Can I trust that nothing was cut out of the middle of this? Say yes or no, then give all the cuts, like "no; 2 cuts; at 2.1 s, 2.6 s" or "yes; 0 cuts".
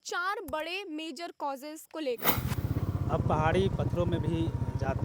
no; 1 cut; at 2.6 s